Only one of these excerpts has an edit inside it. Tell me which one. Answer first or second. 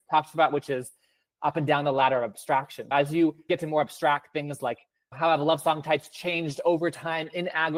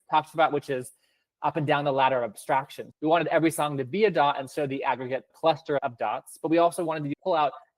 second